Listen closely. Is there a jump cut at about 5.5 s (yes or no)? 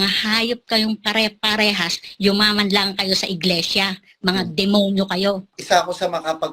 yes